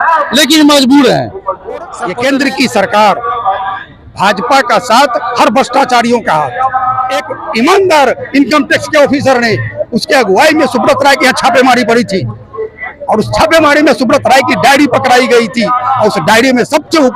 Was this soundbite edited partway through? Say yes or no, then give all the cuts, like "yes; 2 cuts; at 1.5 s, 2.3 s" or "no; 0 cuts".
yes; 2 cuts; at 2.0 s, 7.4 s